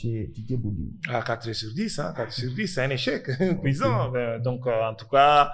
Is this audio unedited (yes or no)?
yes